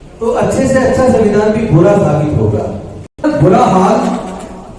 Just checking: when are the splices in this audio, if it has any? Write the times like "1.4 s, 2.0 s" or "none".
3.2 s